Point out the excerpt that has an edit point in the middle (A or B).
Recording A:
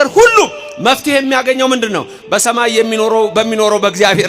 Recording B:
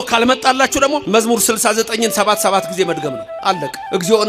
B